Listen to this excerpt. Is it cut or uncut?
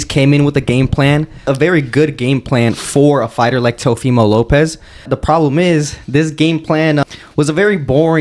cut